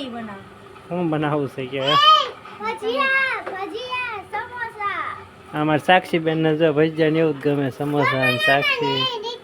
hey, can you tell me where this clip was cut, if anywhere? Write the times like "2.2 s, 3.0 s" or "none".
none